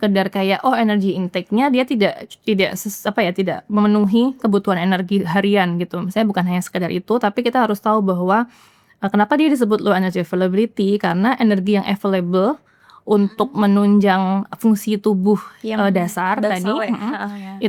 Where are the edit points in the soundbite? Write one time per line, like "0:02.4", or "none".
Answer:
none